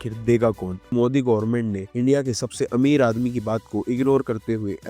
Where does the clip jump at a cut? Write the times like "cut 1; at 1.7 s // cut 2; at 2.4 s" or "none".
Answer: cut 1; at 0.9 s